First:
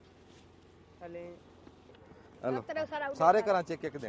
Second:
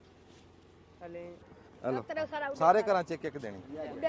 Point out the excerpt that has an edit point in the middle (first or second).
second